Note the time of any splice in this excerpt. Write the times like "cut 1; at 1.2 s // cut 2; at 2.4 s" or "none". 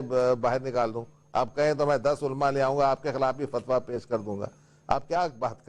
cut 1; at 3.0 s